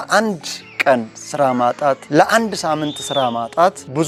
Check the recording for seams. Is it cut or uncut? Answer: uncut